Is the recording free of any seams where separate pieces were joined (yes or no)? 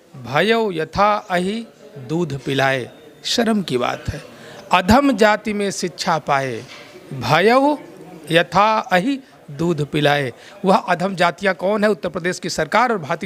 yes